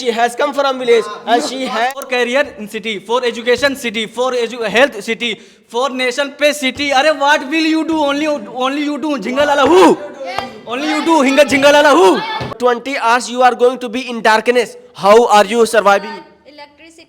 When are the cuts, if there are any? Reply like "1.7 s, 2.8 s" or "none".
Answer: 1.9 s, 12.6 s